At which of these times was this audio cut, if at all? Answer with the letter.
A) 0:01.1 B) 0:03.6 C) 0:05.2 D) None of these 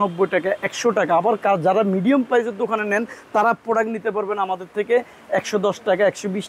D